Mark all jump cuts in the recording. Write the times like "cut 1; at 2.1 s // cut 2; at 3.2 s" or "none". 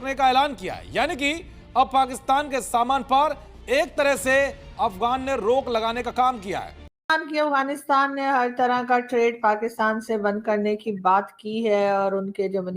cut 1; at 7.0 s

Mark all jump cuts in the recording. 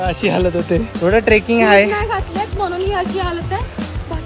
cut 1; at 0.9 s

